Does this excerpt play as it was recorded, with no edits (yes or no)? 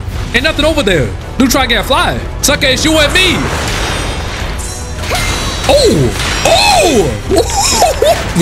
no